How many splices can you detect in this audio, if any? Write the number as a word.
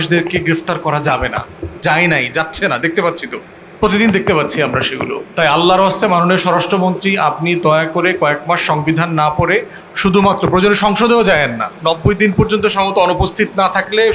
two